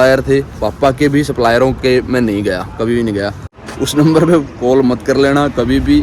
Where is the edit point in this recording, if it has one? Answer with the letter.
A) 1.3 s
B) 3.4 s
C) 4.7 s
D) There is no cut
B